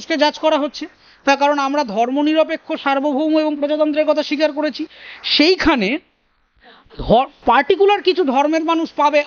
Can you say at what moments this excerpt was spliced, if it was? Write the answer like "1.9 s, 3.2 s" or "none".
none